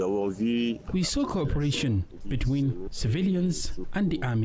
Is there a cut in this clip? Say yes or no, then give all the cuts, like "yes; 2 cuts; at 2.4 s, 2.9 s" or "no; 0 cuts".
yes; 3 cuts; at 0.8 s, 2.1 s, 2.9 s